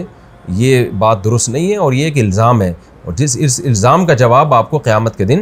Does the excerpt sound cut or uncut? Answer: uncut